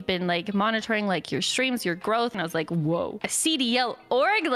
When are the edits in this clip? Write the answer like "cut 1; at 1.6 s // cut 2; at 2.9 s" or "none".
cut 1; at 2.3 s // cut 2; at 3.3 s